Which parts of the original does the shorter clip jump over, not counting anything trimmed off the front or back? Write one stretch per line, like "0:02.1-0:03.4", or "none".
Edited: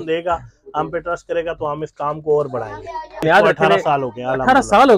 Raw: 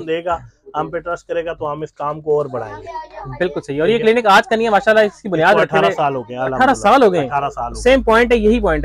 0:03.1-0:05.2